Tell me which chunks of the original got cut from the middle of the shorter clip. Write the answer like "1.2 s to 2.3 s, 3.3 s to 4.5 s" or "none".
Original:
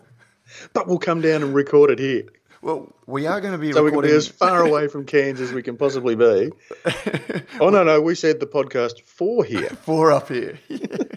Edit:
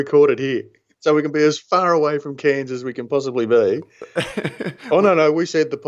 2.5 s to 3.6 s